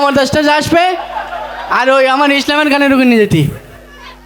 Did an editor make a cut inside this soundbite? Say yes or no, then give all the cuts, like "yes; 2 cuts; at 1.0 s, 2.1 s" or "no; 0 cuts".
no; 0 cuts